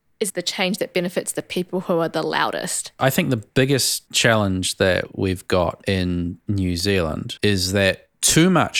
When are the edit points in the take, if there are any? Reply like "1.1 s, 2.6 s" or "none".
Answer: 3.0 s, 7.3 s